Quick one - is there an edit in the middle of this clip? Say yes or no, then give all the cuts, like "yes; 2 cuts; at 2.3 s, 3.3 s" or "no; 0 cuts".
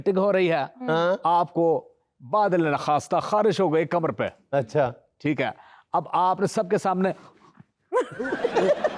no; 0 cuts